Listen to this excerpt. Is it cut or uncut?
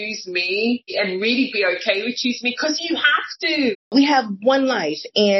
cut